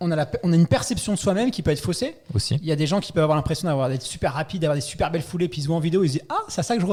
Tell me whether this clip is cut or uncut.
uncut